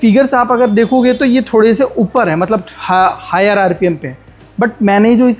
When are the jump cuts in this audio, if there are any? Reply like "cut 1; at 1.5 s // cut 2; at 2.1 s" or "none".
none